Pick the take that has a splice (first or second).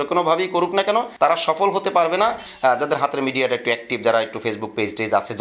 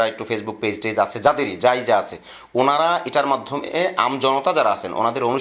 first